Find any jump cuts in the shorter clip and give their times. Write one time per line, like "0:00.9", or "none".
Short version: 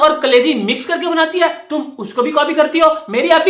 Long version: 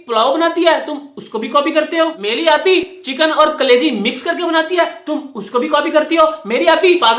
none